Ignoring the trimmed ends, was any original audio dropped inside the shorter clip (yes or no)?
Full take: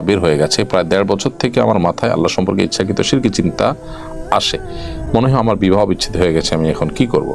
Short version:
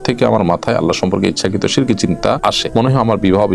yes